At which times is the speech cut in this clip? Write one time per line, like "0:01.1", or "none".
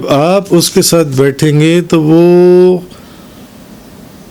none